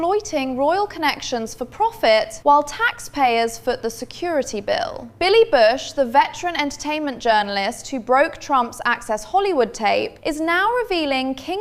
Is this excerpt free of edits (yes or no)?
yes